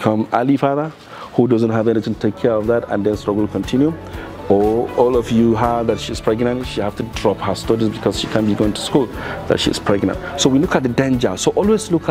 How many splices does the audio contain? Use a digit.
0